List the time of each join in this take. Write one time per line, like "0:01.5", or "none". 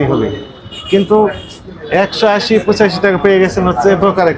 none